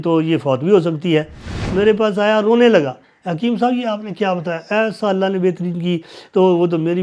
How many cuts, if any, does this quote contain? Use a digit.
1